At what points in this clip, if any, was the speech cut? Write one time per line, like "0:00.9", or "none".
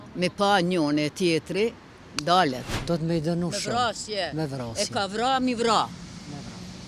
0:02.7